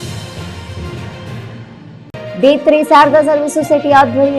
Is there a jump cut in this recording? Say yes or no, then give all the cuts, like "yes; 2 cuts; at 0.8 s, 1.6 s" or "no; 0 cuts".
yes; 1 cut; at 2.0 s